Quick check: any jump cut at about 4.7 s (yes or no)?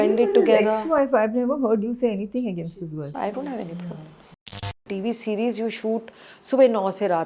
yes